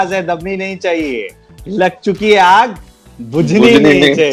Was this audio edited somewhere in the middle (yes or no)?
no